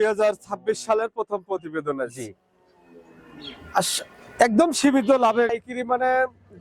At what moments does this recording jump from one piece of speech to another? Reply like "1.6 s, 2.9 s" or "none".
5.5 s